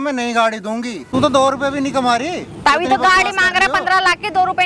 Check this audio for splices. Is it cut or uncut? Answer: cut